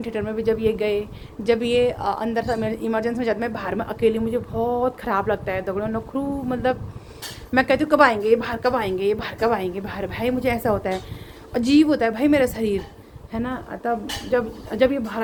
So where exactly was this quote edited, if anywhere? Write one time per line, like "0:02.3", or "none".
none